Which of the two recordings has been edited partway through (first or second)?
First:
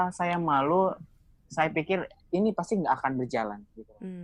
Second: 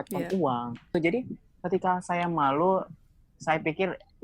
second